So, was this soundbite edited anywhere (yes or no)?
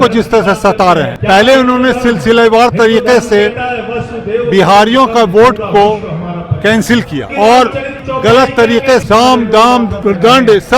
yes